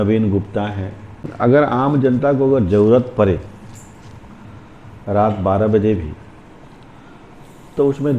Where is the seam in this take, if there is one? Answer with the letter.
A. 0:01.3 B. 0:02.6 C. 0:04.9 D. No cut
A